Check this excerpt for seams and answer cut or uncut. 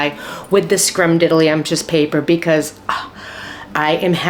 uncut